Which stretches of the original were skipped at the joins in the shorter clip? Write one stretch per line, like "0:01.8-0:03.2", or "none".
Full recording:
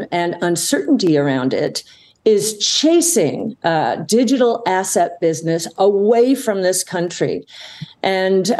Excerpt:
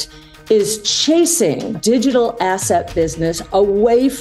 0:03.5-0:04.0